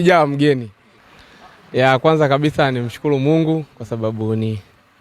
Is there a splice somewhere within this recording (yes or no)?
yes